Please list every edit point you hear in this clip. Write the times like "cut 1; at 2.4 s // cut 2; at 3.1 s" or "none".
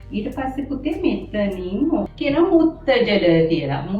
cut 1; at 2.1 s